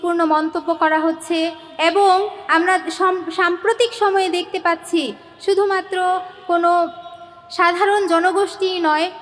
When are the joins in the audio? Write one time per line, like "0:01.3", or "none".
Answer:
none

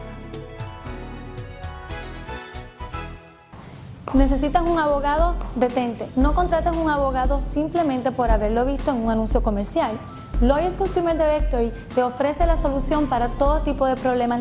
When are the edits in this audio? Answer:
0:03.4

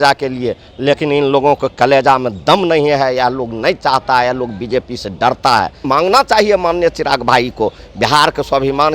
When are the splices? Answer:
0:05.8

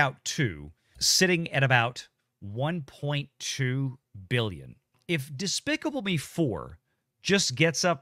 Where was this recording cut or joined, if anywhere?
0:01.0
0:05.0

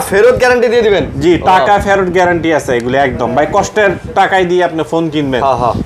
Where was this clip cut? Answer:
none

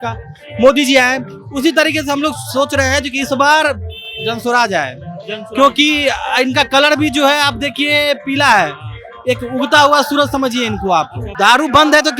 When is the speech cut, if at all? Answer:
0:11.2

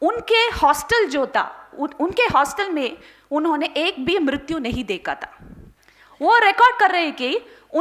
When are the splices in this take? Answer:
none

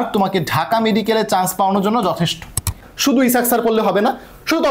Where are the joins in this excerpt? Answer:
0:02.9

